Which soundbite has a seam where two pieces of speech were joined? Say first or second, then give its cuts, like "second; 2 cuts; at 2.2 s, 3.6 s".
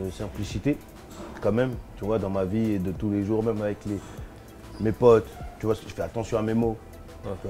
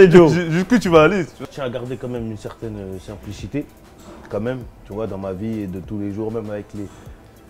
second; 1 cut; at 1.5 s